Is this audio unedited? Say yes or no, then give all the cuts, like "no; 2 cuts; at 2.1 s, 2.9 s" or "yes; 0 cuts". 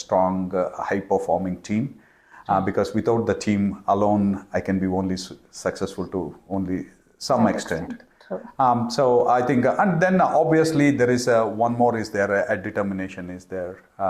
yes; 0 cuts